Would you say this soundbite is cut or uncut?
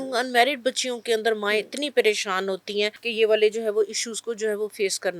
cut